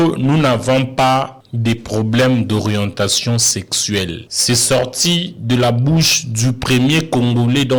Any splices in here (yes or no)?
yes